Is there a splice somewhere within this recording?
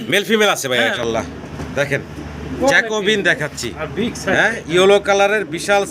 yes; 1 cut; at 1.0 s

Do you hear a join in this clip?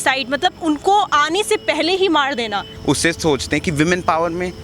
yes; 1 cut; at 2.7 s

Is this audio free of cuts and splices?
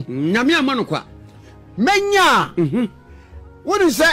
yes; 0 cuts

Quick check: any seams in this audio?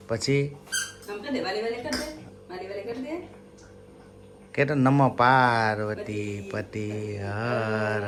no; 0 cuts

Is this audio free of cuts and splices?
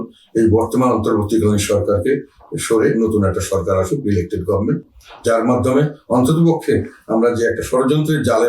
yes; 0 cuts

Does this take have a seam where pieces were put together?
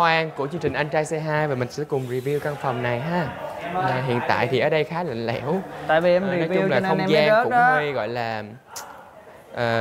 no; 0 cuts

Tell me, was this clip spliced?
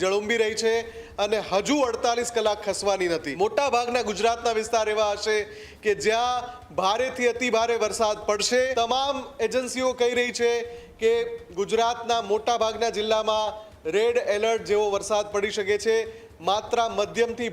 yes; 2 cuts; at 3.3 s, 8.7 s

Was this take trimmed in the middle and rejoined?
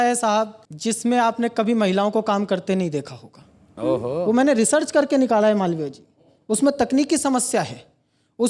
no; 0 cuts

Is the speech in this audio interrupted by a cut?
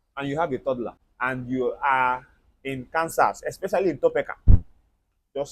yes; 1 cut; at 1.0 s

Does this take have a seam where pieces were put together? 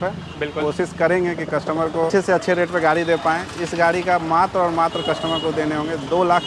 yes; 1 cut; at 2.1 s

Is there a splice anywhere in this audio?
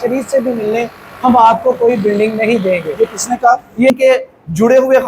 yes; 1 cut; at 3.9 s

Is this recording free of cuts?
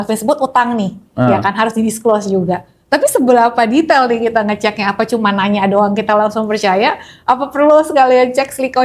yes; 0 cuts

